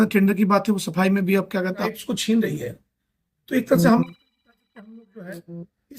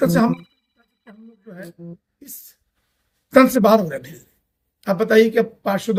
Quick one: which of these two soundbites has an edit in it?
first; 1 cut; at 2.0 s

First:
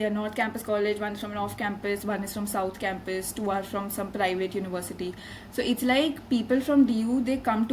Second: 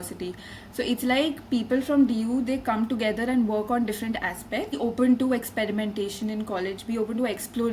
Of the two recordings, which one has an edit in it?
second; 1 cut; at 4.8 s

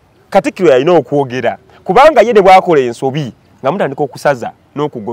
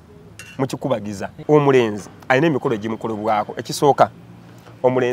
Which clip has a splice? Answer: second; 1 cut; at 1.3 s

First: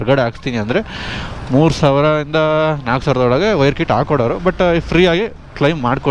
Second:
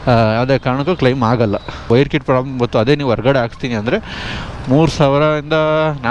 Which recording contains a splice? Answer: second; 1 cut; at 1.9 s

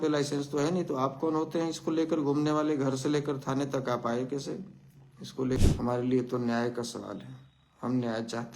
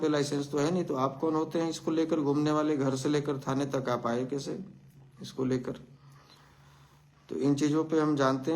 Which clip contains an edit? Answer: first; 1 cut; at 5.6 s

